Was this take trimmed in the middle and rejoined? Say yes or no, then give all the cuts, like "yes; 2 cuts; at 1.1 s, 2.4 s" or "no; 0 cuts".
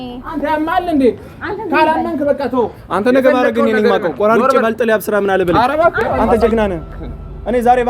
yes; 1 cut; at 6.1 s